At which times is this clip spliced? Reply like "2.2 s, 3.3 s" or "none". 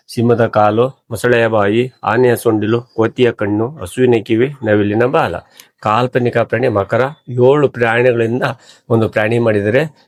none